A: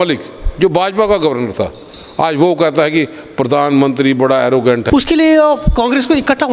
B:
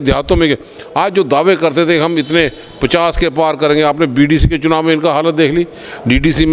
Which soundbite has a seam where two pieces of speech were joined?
A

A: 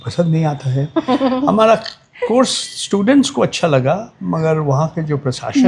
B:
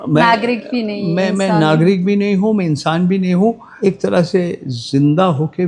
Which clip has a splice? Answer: B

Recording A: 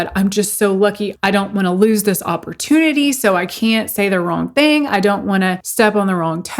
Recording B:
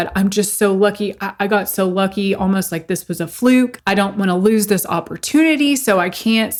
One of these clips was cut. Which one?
A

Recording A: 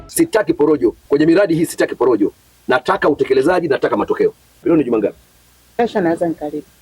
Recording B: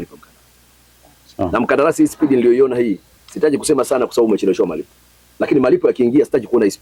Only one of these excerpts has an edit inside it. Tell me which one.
A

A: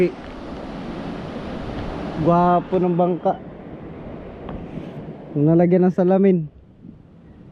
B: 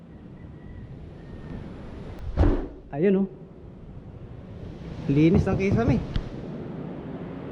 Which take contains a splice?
B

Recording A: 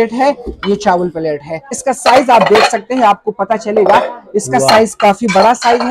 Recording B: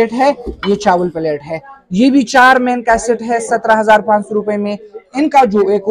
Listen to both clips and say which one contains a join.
A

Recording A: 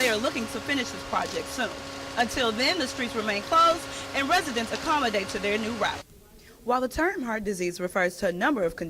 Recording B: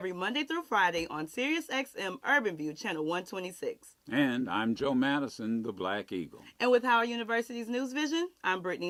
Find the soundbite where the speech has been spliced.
A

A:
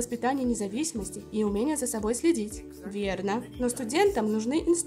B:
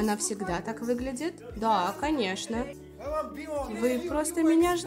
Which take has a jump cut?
B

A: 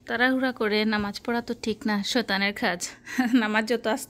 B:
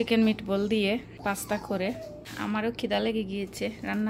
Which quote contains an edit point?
B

